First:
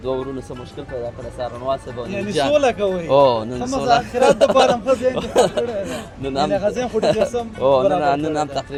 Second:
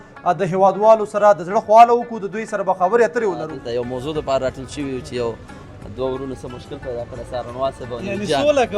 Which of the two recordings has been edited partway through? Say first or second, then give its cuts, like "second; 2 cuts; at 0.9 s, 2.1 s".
second; 1 cut; at 3.6 s